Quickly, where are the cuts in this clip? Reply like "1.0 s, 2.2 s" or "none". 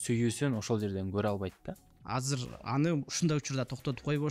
1.9 s